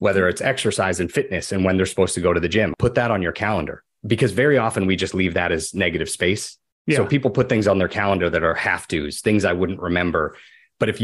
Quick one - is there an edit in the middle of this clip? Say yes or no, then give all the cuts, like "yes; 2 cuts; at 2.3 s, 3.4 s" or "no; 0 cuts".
yes; 2 cuts; at 2.7 s, 3.9 s